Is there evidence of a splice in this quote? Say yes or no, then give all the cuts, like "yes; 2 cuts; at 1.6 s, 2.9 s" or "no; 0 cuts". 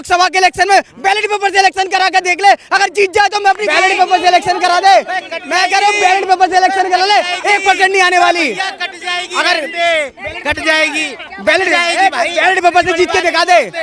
no; 0 cuts